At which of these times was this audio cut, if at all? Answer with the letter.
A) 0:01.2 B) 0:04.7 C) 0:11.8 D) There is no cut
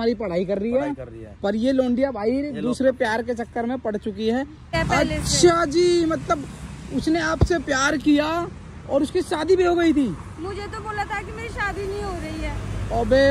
B